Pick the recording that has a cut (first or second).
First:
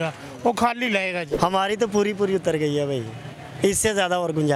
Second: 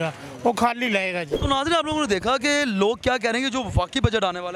first